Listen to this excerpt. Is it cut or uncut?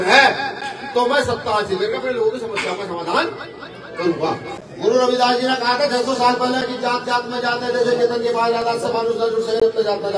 cut